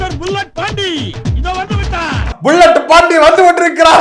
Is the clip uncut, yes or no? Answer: yes